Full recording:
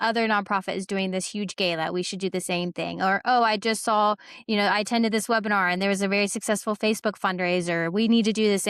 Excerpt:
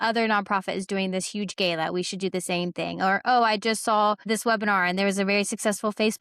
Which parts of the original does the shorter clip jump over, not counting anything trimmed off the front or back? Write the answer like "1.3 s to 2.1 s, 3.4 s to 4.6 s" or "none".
4.3 s to 5.1 s